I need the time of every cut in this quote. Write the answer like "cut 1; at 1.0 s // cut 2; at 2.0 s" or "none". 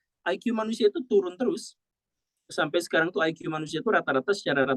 none

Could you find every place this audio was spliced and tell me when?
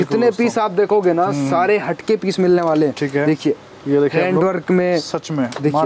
none

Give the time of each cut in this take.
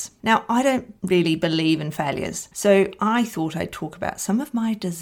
cut 1; at 0.9 s // cut 2; at 2.4 s

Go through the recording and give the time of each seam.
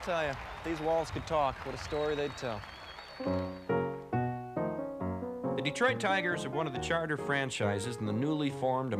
none

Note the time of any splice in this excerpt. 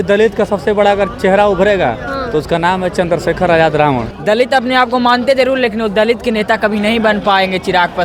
cut 1; at 4.1 s

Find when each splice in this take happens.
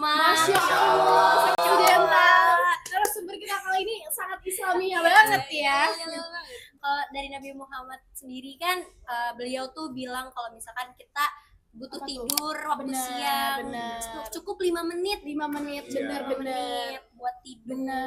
none

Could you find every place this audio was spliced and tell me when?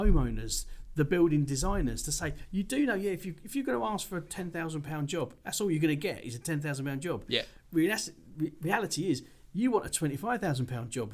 none

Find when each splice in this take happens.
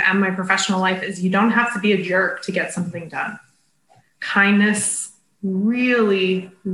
none

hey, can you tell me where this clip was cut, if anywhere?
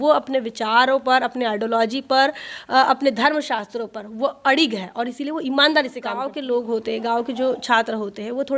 cut 1; at 6.3 s

